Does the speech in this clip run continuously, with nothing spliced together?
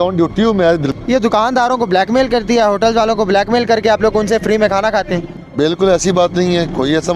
no; 2 cuts; at 0.9 s, 5.4 s

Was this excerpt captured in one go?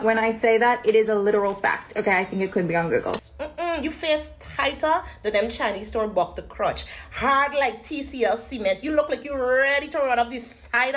no; 1 cut; at 3.3 s

